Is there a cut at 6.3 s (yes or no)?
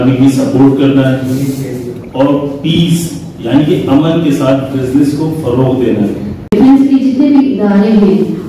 yes